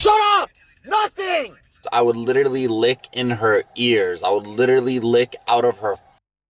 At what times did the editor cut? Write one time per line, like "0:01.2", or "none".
0:01.8

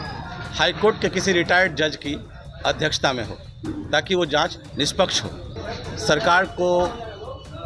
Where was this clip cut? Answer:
0:05.5

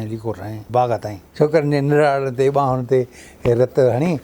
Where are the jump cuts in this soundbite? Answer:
0:01.2

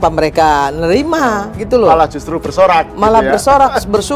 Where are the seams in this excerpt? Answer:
none

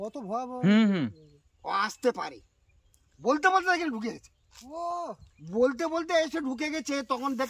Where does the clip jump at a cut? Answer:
none

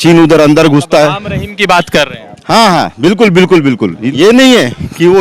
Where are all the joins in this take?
0:04.1

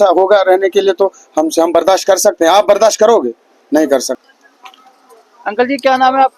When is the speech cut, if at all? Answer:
0:04.2

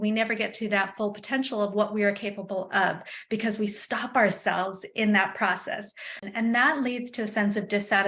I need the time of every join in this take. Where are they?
0:06.2

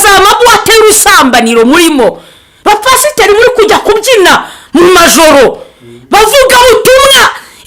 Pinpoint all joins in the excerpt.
none

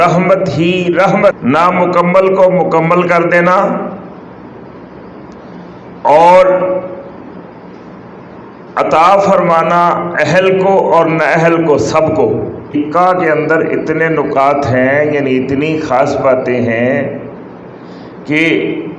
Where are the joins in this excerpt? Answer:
0:01.3
0:12.7

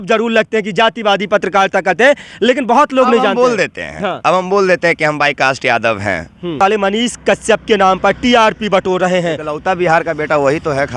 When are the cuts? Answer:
0:06.6

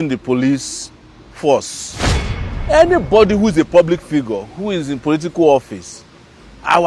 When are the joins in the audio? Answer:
0:02.3

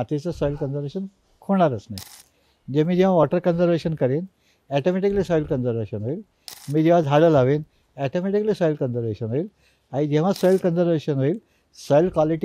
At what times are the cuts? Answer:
none

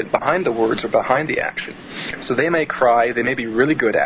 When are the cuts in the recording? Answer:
0:02.8

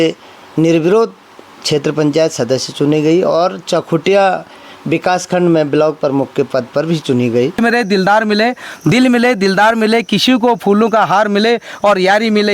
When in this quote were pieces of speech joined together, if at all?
0:07.6

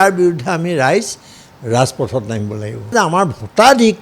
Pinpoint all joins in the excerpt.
0:02.9

